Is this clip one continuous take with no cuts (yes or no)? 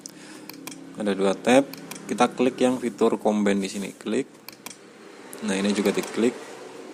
yes